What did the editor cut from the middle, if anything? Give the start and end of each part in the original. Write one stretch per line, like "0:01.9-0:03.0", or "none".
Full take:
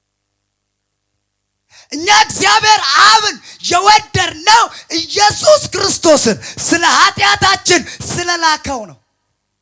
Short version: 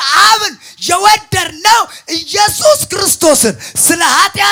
none